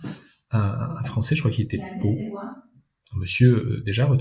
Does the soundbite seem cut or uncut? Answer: uncut